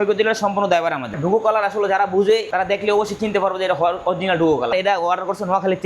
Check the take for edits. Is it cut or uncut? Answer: cut